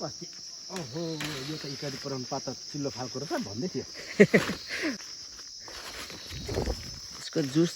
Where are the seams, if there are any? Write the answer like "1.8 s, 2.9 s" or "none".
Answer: 5.0 s